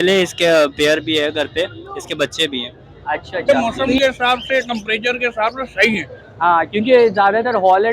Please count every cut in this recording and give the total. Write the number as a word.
one